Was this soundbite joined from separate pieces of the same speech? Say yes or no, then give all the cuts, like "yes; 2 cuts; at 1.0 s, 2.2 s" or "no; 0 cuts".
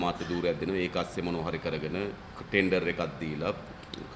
yes; 1 cut; at 2.3 s